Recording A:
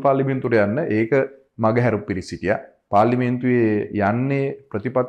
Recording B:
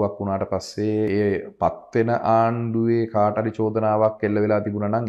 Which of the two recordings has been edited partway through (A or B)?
B